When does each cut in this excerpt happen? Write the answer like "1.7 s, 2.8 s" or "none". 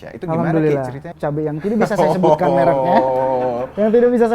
1.1 s